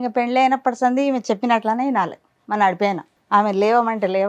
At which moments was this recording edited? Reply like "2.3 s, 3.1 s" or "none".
3.1 s